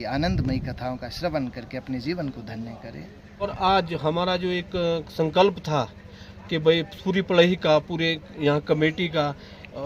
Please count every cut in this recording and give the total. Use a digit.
1